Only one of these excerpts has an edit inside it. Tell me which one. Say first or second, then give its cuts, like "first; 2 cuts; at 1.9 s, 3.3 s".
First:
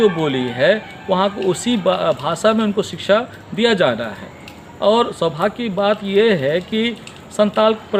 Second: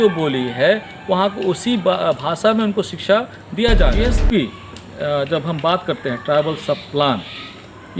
second; 1 cut; at 4.0 s